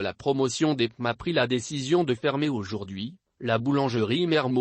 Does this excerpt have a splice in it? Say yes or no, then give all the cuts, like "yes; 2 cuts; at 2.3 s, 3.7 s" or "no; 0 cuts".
yes; 1 cut; at 0.9 s